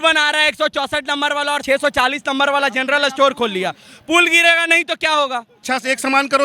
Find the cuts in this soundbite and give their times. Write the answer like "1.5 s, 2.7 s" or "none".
1.6 s, 5.5 s